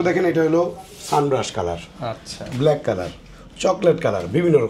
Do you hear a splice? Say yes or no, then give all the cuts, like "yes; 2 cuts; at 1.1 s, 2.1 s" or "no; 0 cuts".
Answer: no; 0 cuts